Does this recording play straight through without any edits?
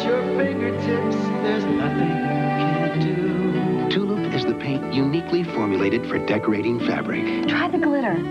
no; 1 cut; at 6.0 s

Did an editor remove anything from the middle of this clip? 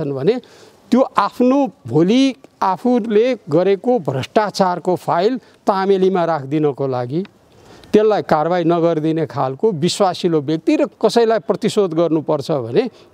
yes; 1 cut; at 10.9 s

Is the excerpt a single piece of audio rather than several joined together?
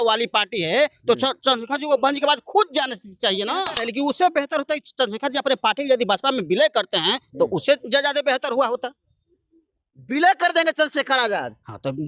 no; 1 cut; at 3.8 s

